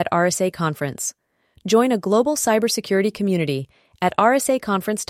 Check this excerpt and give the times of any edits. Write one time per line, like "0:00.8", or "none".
none